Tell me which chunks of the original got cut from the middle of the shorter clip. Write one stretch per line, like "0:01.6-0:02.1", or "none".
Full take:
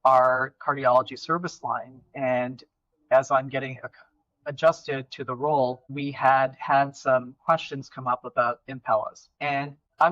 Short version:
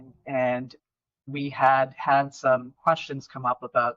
0:03.0-0:05.8